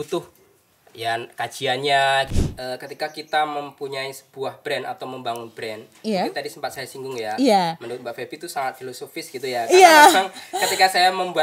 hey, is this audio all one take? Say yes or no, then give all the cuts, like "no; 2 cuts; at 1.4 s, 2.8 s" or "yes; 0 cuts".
no; 1 cut; at 2.3 s